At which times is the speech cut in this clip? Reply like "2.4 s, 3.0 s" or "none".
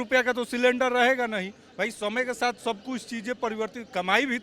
none